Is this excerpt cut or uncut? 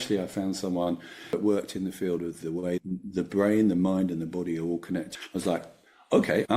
cut